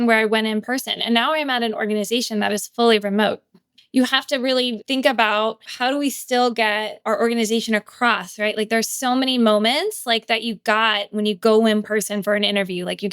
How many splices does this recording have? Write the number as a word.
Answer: four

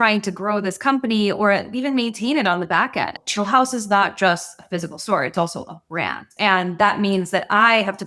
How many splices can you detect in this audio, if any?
two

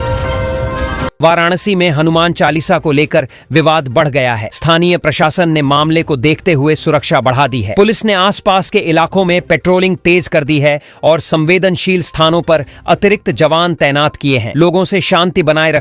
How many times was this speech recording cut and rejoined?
one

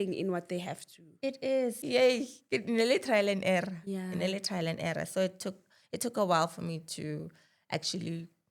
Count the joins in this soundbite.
one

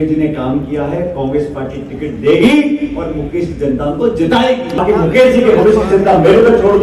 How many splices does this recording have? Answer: one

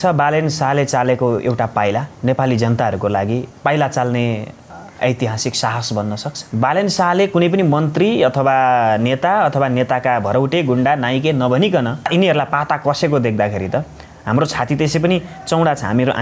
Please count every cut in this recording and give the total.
four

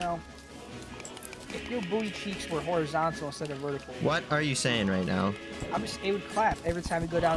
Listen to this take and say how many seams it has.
one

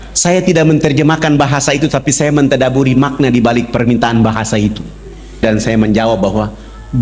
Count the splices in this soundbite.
one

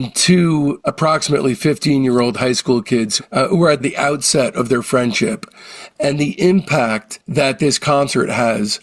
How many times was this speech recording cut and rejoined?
one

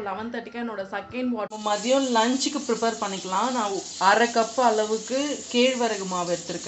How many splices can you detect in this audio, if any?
one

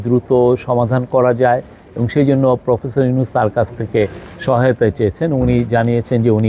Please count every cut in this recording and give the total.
zero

